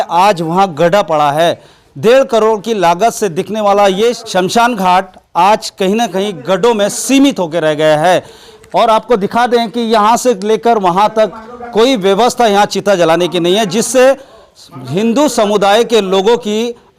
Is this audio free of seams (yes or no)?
no